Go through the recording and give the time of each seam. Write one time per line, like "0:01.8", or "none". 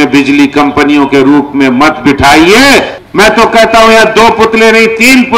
0:03.0